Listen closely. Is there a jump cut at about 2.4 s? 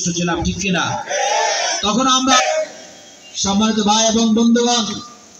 yes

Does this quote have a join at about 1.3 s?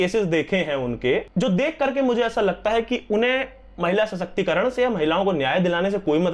yes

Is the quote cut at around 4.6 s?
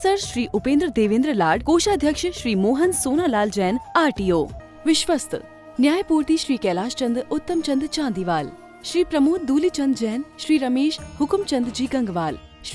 yes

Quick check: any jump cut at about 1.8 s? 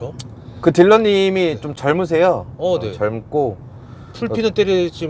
no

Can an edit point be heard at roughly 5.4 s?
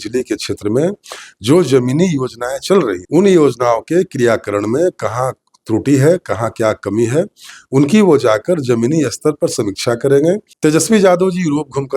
no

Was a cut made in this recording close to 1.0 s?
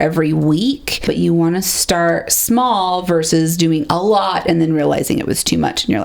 yes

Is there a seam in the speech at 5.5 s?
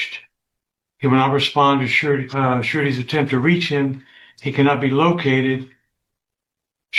no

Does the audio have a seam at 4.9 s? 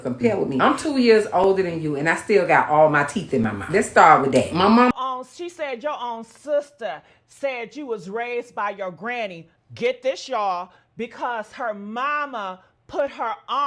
yes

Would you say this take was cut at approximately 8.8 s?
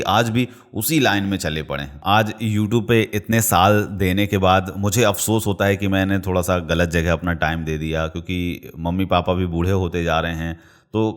no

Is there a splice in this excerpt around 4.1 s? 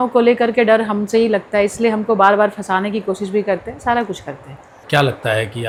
no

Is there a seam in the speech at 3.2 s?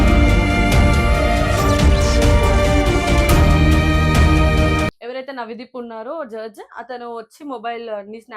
no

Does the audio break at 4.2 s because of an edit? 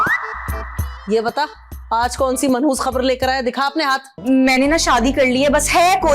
yes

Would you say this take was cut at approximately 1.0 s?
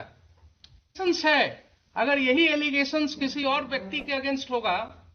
yes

